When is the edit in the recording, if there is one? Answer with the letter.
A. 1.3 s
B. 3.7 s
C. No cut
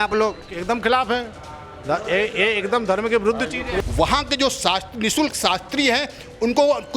B